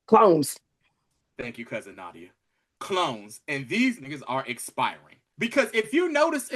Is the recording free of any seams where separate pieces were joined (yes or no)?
no